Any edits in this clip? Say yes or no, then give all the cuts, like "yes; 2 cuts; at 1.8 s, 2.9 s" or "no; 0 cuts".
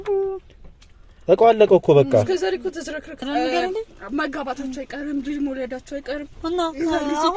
yes; 1 cut; at 3.2 s